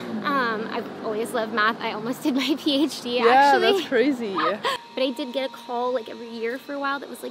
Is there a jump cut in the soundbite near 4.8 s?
yes; 1 cut; at 4.8 s

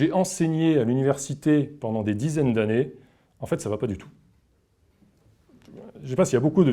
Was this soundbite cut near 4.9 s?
yes; 1 cut; at 4.9 s

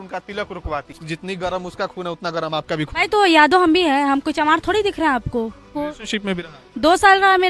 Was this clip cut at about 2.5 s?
no; 2 cuts; at 0.9 s, 5.7 s

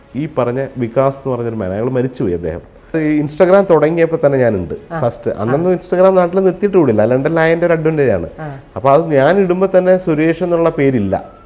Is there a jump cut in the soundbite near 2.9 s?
yes; 1 cut; at 2.9 s

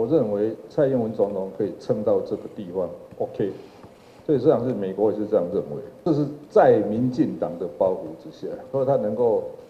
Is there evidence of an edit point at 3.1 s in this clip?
no; 2 cuts; at 5.8 s, 8.6 s

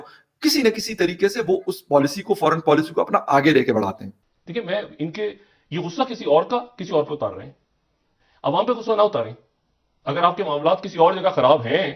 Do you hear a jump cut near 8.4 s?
no; 1 cut; at 4.0 s

